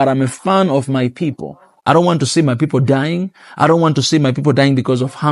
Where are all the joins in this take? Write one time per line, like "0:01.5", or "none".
none